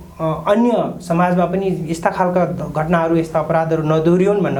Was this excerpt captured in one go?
yes; 0 cuts

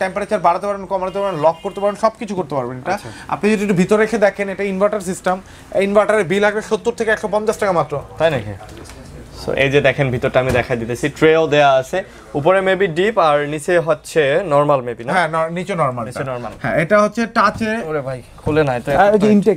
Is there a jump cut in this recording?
no; 0 cuts

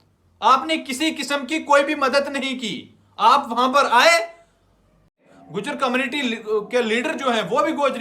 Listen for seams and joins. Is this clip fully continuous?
no; 1 cut; at 5.3 s

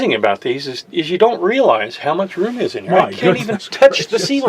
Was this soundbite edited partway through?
no; 0 cuts

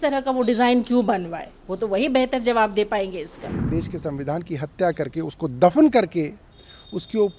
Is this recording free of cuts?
no; 1 cut; at 3.7 s

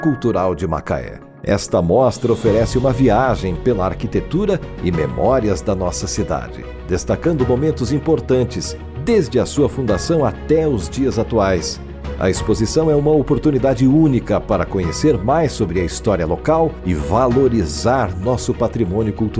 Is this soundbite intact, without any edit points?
yes; 0 cuts

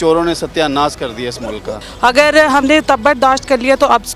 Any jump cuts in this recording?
yes; 1 cut; at 1.8 s

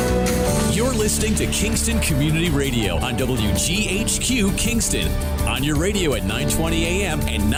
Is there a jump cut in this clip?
no; 0 cuts

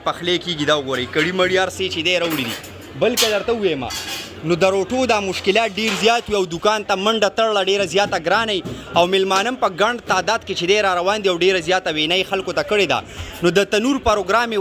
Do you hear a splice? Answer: no; 0 cuts

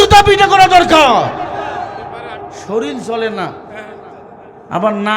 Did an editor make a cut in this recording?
yes; 1 cut; at 2.6 s

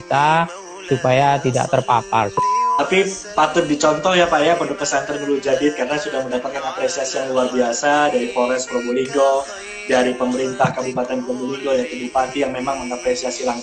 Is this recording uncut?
no; 1 cut; at 2.4 s

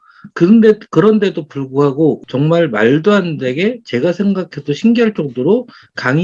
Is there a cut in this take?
yes; 1 cut; at 2.2 s

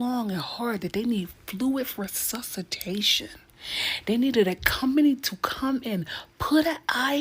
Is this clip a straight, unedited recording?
yes; 0 cuts

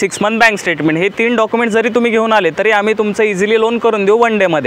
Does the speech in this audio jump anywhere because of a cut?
no; 0 cuts

